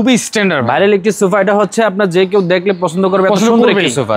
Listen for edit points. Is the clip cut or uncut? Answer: uncut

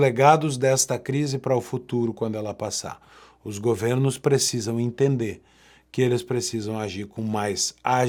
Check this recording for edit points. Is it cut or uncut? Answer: uncut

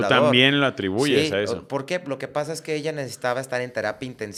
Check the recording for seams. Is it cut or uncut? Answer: uncut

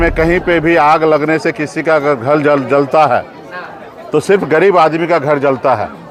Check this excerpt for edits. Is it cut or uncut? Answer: uncut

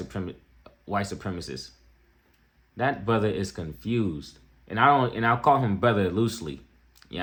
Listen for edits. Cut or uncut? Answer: uncut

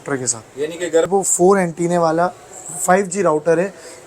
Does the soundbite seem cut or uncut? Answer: cut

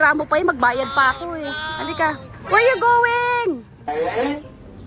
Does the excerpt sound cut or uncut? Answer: cut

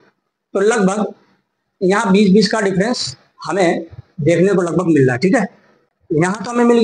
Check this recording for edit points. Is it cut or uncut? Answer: uncut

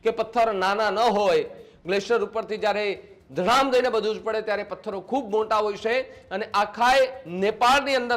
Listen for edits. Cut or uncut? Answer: uncut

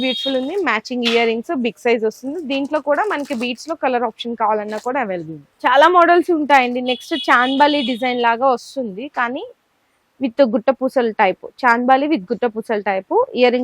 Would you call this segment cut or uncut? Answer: uncut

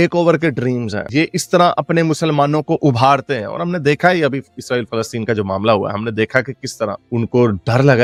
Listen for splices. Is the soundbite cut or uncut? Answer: uncut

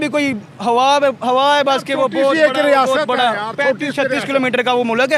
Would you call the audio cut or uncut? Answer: uncut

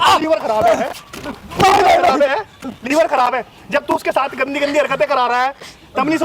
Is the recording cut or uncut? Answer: uncut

